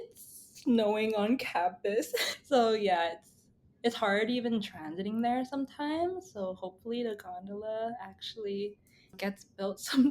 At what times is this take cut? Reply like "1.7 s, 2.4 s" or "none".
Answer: 2.2 s, 9.2 s